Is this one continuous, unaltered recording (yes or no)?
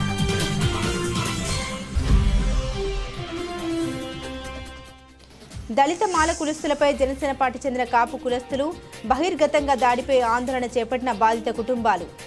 no